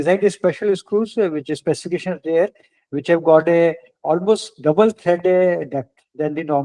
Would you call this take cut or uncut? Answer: uncut